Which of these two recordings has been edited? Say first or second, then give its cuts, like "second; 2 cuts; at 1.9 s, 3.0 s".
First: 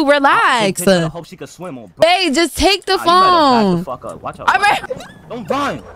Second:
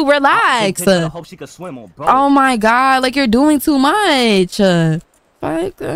first; 2 cuts; at 2.0 s, 4.8 s